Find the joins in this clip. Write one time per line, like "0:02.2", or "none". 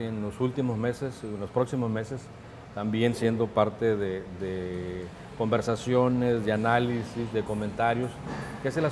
0:07.0